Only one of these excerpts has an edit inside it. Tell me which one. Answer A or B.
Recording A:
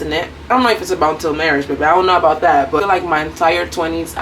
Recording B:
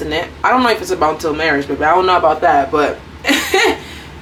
A